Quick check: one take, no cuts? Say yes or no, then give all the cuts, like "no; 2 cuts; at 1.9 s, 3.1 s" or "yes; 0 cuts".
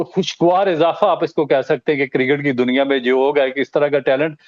yes; 0 cuts